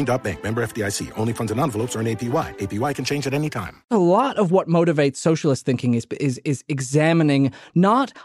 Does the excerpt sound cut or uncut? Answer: cut